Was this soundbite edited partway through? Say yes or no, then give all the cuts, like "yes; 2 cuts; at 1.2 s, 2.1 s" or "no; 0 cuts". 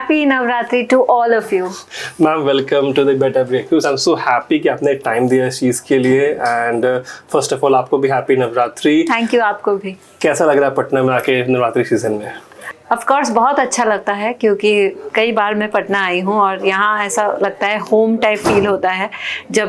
no; 0 cuts